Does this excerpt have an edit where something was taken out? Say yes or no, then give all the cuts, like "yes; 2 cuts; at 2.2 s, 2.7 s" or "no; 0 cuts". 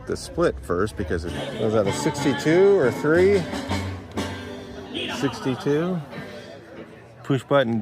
yes; 1 cut; at 1.4 s